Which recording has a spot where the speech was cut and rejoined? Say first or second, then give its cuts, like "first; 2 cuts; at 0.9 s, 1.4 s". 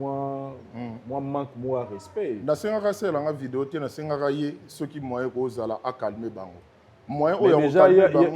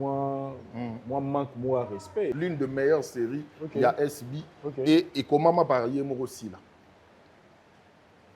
second; 1 cut; at 2.4 s